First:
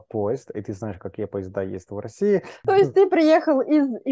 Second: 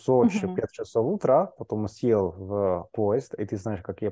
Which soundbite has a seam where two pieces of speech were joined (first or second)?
first